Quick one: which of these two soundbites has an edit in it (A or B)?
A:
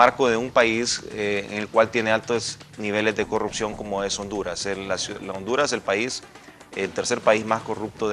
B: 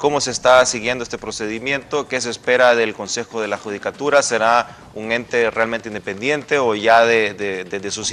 A